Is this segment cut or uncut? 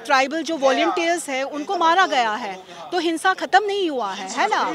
uncut